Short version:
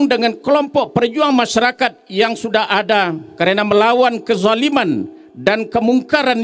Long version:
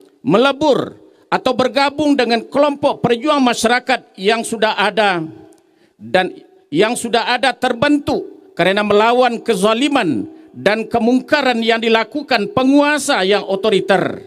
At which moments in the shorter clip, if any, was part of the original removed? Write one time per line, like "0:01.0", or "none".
0:03.2